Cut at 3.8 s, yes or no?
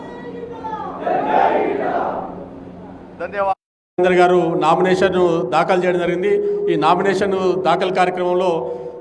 yes